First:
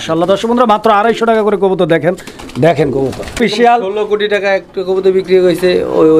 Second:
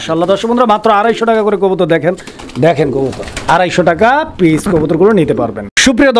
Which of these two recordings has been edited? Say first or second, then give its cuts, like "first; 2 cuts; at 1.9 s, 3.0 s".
first; 1 cut; at 3.4 s